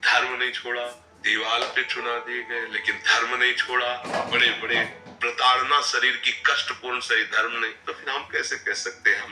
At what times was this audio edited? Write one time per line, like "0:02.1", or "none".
0:01.2
0:04.1
0:07.8

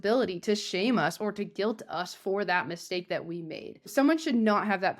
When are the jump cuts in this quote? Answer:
0:03.9

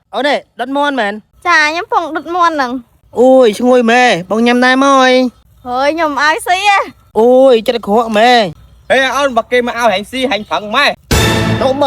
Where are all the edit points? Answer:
0:08.6

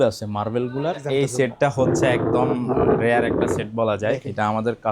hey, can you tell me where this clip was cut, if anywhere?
0:01.1

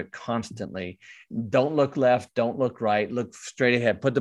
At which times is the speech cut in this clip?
0:01.3

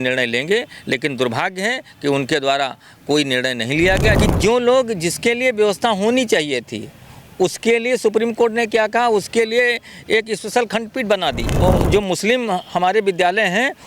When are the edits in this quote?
0:04.2
0:11.5

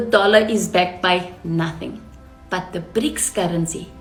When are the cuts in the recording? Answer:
none

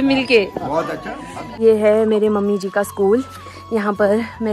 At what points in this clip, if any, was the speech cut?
0:01.6

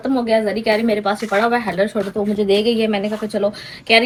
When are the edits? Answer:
none

